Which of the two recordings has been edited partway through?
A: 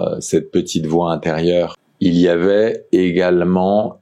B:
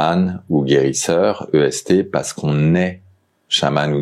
A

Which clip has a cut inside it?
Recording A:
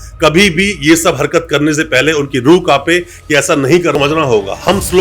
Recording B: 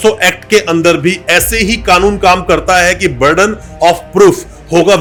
A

